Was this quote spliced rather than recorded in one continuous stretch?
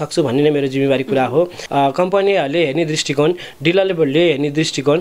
yes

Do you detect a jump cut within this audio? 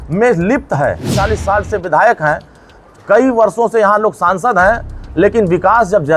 yes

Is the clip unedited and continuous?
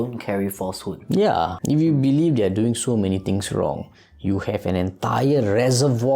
no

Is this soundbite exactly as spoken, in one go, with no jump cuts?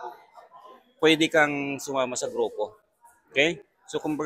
yes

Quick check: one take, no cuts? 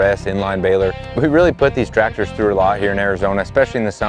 no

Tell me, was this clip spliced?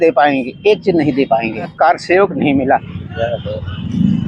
yes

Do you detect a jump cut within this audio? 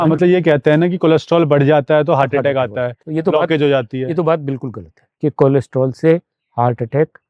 yes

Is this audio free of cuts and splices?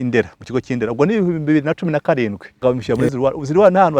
no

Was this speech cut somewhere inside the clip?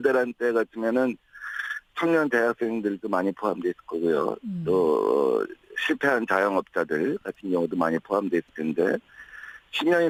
no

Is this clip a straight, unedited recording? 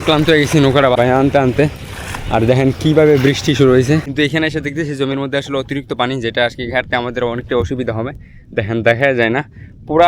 no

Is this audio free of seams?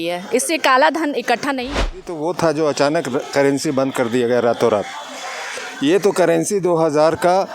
no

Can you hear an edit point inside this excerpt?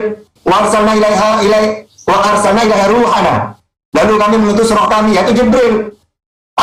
no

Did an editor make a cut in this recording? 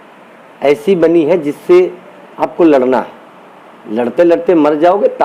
no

